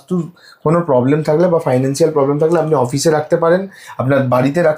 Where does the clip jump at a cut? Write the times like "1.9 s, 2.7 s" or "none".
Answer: none